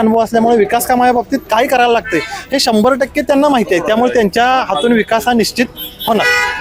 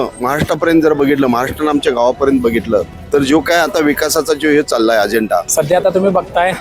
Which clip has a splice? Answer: second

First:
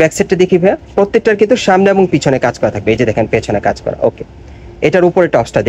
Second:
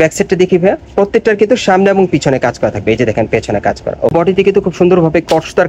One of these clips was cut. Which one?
second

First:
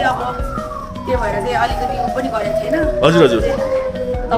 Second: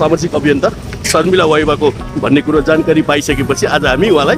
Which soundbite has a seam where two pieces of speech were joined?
second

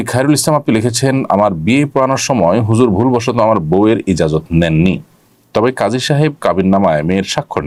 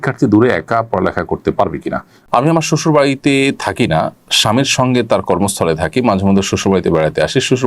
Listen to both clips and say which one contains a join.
second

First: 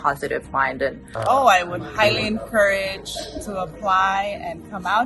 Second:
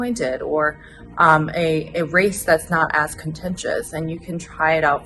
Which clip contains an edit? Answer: first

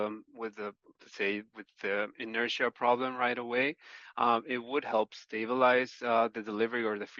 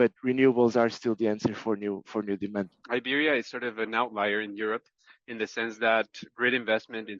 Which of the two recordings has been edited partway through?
second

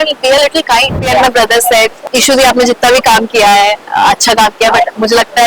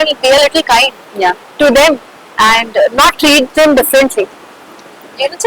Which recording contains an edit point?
first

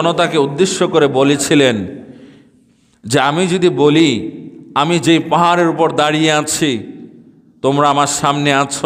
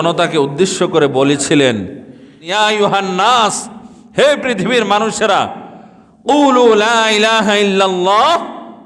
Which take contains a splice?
second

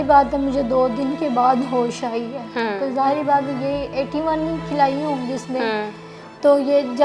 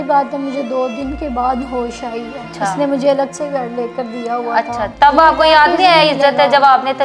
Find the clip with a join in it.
second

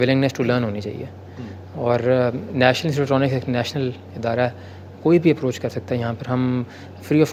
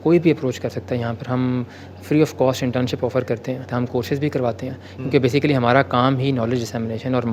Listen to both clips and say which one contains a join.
second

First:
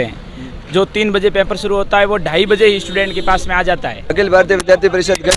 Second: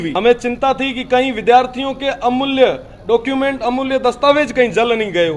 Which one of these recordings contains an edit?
first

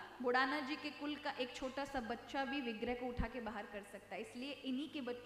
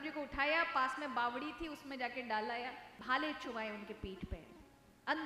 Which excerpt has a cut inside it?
second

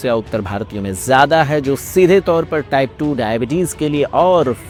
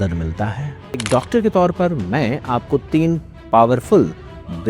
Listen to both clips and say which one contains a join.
second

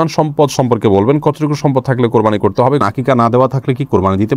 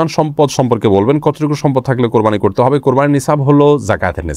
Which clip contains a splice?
first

